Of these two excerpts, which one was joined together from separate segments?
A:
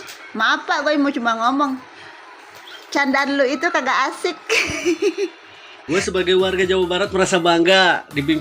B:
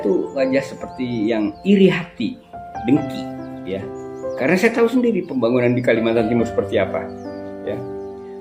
A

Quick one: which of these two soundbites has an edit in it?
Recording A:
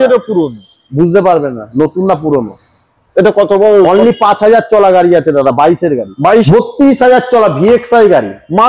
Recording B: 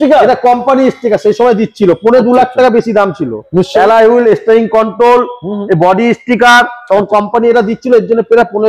A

